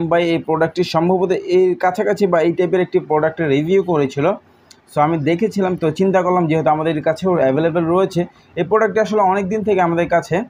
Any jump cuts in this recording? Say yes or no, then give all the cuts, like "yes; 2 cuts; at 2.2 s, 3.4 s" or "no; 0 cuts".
no; 0 cuts